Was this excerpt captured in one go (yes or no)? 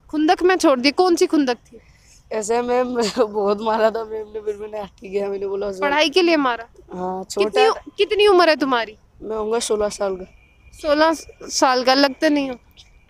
yes